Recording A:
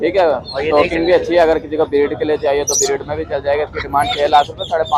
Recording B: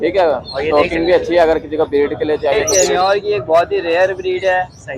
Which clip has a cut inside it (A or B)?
B